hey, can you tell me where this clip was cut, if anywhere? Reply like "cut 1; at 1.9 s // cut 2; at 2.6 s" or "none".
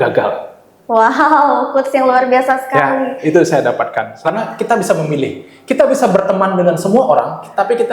cut 1; at 4.1 s